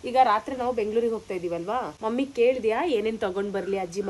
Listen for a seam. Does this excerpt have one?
yes; 1 cut; at 1.9 s

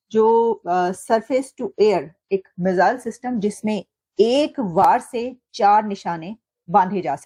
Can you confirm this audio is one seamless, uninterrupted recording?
yes; 0 cuts

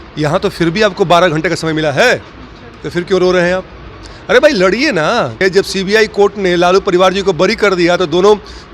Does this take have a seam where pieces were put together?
yes; 1 cut; at 5.4 s

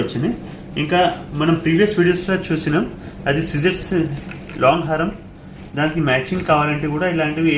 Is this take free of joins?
yes; 0 cuts

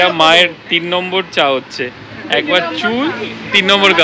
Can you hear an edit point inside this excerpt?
no; 0 cuts

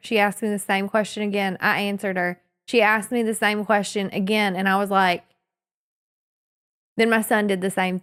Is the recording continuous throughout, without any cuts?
yes; 0 cuts

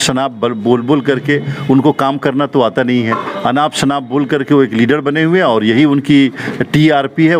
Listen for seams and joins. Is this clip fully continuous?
yes; 0 cuts

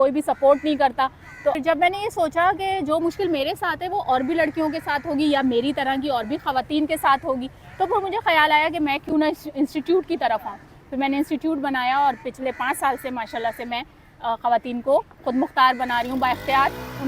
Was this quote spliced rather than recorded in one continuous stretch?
yes; 1 cut; at 1.6 s

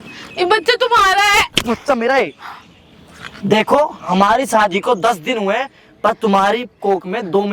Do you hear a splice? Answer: no; 0 cuts

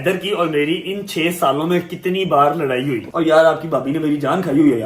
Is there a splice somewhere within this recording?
yes; 1 cut; at 3.0 s

